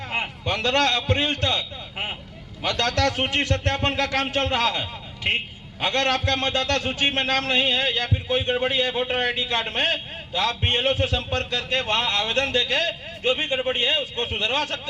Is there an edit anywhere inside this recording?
no; 0 cuts

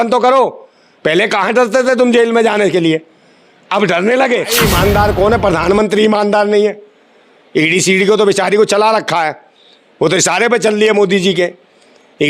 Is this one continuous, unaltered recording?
no; 1 cut; at 4.6 s

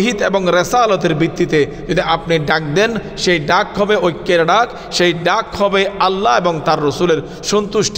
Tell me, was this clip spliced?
no; 0 cuts

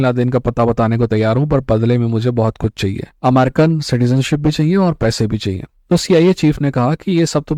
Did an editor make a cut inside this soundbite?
no; 0 cuts

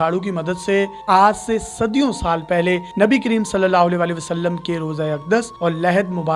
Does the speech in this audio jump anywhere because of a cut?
yes; 1 cut; at 1.0 s

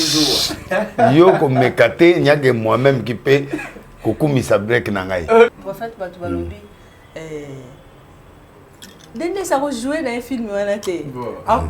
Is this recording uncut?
no; 1 cut; at 5.6 s

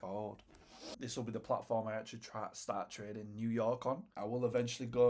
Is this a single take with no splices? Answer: no; 2 cuts; at 1.0 s, 4.1 s

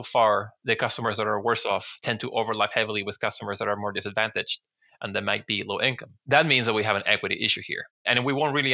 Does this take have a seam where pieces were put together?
no; 0 cuts

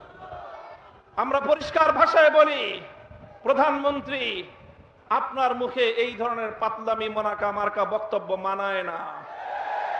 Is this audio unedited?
yes; 0 cuts

